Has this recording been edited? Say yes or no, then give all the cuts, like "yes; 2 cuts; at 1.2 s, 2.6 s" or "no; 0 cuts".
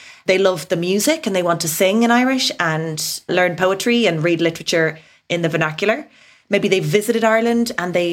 yes; 1 cut; at 3.3 s